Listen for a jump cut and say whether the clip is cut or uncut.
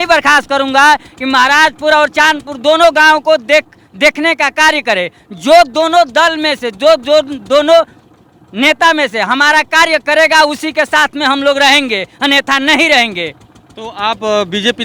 uncut